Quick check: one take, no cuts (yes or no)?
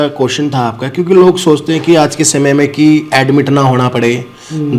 yes